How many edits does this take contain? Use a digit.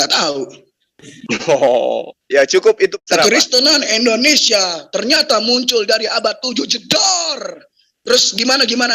1